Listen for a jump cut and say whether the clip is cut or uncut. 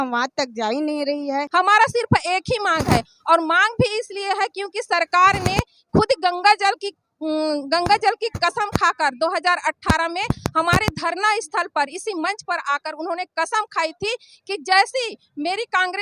cut